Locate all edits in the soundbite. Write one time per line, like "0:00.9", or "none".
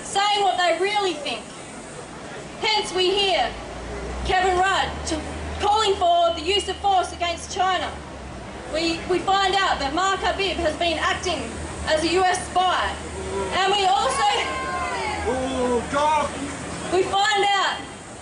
0:13.6